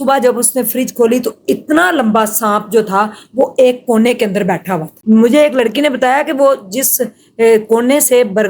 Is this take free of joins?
no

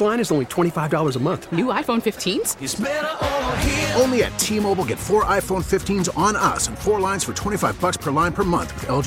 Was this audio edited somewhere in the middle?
no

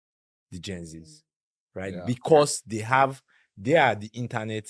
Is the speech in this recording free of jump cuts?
yes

